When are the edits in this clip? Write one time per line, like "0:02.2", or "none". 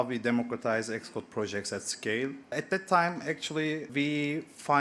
0:02.5
0:03.9